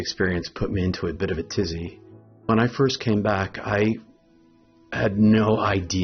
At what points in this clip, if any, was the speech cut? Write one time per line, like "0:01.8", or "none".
0:02.5